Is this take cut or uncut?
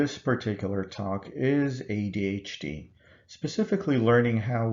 cut